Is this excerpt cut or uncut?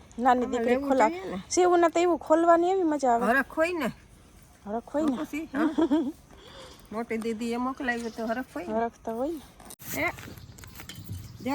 cut